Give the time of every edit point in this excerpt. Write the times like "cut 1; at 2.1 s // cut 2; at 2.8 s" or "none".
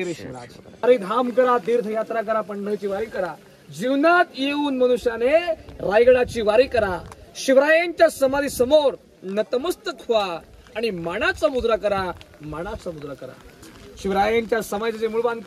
cut 1; at 0.8 s // cut 2; at 13.7 s